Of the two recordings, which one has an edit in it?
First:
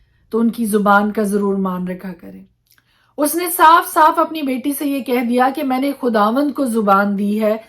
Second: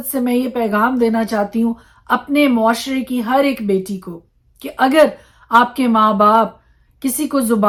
first; 1 cut; at 2.3 s

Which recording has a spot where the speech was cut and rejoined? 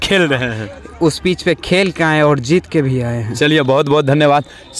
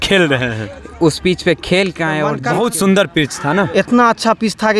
second; 1 cut; at 2.4 s

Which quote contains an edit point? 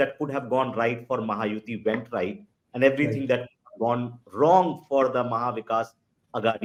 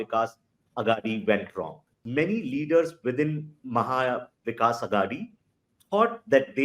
second; 1 cut; at 2.0 s

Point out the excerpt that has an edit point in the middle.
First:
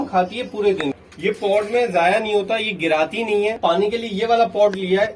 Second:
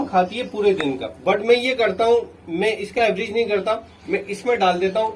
first; 2 cuts; at 1.1 s, 3.6 s

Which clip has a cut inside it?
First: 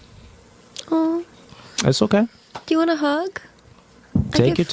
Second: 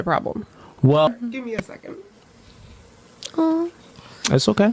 second; 1 cut; at 1.1 s

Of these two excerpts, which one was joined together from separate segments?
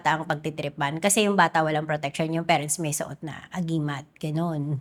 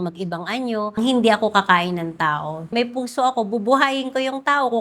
second; 2 cuts; at 1.0 s, 2.7 s

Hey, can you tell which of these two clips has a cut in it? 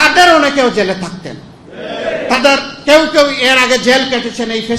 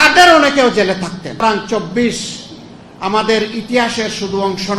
second; 1 cut; at 1.4 s

